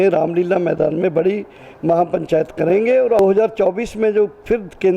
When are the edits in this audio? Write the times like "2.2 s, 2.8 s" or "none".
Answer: 3.2 s